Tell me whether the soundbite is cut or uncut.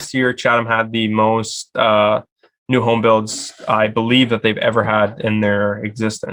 uncut